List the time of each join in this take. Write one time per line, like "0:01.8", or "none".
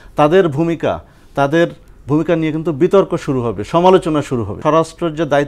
0:04.6